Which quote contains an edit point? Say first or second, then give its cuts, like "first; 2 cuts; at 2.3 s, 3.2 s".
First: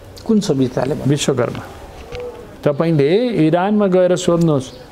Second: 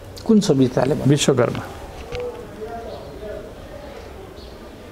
first; 1 cut; at 2.4 s